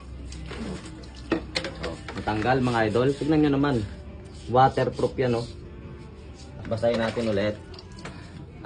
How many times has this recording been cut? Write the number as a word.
one